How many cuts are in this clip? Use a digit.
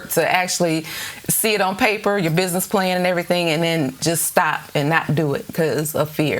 0